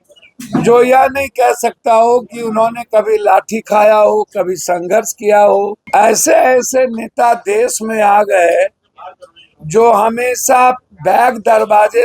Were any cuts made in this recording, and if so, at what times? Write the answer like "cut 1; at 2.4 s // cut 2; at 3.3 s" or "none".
cut 1; at 5.8 s

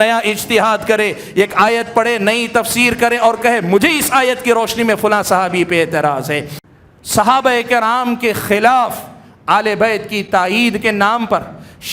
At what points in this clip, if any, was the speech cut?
cut 1; at 6.5 s

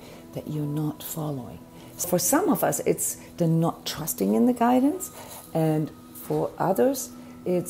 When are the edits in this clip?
cut 1; at 2.0 s

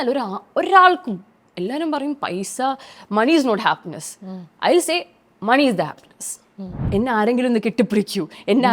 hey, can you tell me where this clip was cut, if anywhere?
cut 1; at 6.8 s

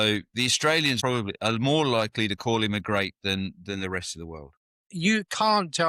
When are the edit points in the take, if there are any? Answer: cut 1; at 1.0 s // cut 2; at 4.9 s

